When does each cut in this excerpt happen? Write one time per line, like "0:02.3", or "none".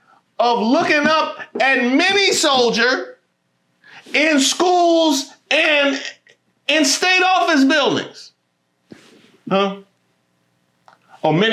none